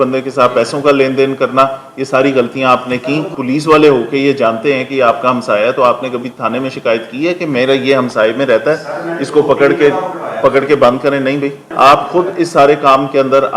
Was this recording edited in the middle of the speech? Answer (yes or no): yes